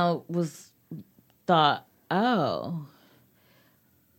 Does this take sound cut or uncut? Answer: uncut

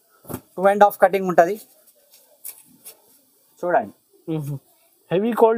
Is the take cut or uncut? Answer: uncut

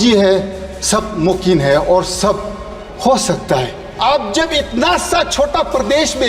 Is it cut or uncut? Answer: cut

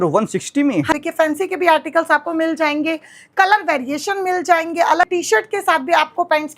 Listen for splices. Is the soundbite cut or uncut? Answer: cut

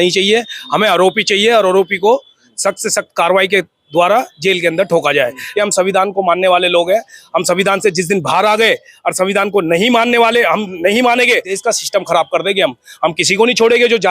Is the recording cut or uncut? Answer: cut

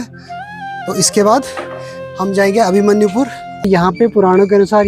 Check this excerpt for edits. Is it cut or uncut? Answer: cut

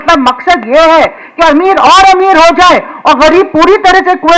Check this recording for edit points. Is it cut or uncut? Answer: uncut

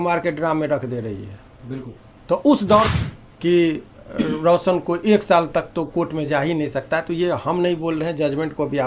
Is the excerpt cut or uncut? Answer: cut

